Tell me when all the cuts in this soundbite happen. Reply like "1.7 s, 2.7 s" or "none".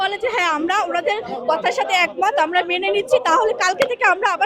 none